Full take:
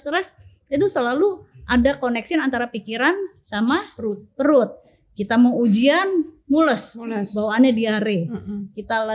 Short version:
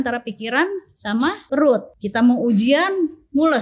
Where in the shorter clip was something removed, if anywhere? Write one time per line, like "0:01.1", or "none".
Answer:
0:01.6